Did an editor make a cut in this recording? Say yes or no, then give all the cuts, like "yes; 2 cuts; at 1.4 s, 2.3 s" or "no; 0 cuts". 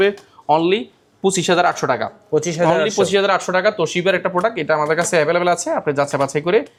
no; 0 cuts